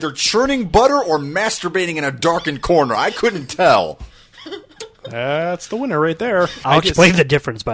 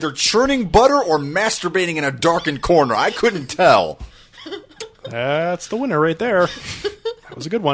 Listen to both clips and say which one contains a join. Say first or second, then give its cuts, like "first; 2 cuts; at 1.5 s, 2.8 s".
first; 1 cut; at 6.6 s